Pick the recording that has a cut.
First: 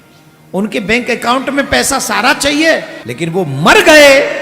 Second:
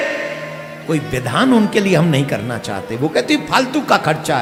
first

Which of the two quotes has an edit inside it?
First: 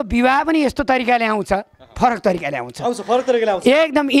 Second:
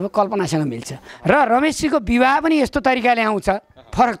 second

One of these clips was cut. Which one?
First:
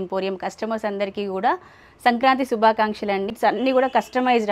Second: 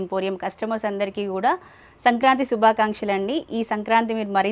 first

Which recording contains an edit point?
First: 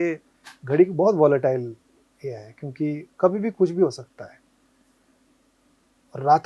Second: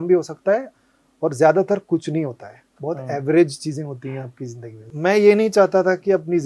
second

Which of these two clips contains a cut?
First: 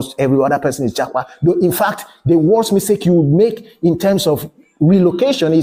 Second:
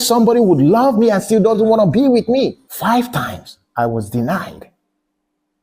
second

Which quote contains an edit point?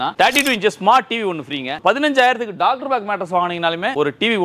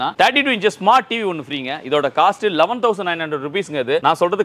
first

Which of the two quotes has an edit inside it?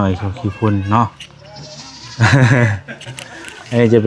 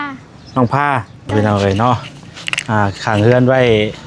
second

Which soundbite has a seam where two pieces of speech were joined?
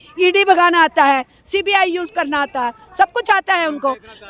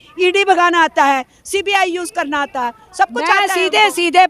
second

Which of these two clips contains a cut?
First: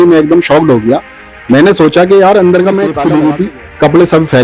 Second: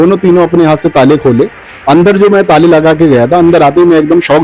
first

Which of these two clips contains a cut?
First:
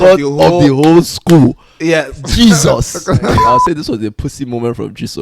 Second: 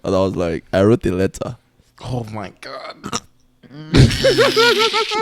first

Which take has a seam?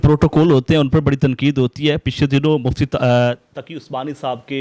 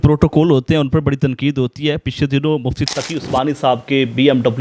second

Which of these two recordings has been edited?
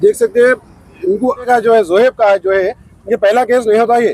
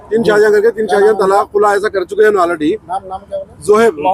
first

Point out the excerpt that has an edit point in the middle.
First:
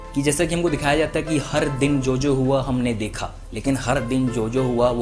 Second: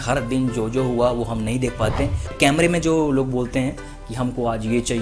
second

